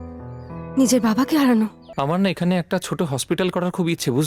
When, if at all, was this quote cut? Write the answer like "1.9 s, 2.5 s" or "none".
1.8 s

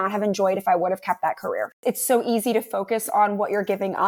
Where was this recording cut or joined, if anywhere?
1.8 s

